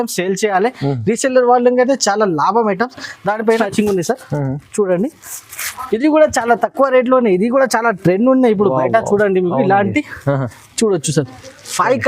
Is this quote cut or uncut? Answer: cut